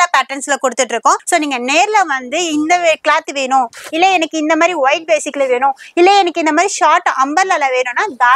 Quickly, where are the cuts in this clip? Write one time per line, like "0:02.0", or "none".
0:01.2